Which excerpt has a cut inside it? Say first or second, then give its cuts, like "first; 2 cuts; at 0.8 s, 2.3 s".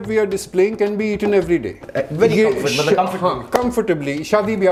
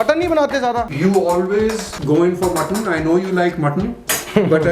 second; 2 cuts; at 0.9 s, 1.9 s